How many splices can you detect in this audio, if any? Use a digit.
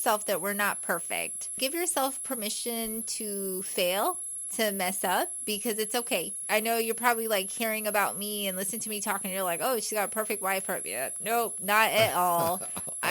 2